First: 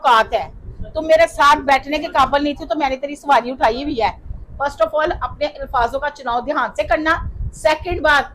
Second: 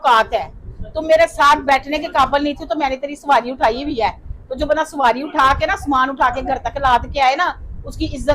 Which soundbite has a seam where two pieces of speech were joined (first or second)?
first